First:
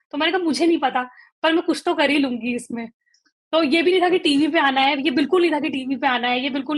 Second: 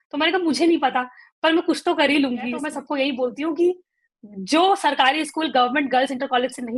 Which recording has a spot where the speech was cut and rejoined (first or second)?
second